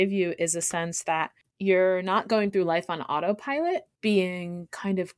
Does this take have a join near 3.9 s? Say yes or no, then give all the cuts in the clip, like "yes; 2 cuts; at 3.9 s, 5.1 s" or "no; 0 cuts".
yes; 2 cuts; at 1.4 s, 3.9 s